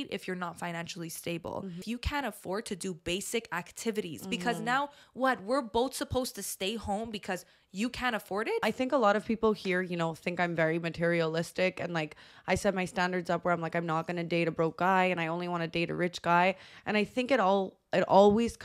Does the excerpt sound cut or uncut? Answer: cut